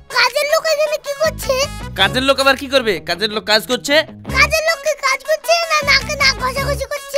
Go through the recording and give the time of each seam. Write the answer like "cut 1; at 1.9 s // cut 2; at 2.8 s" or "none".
none